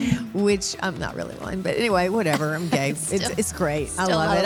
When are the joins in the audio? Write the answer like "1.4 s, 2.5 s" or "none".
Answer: none